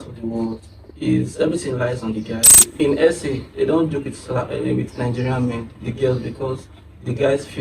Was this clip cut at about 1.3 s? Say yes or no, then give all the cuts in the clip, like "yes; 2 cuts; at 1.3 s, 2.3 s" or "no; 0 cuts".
no; 1 cut; at 2.7 s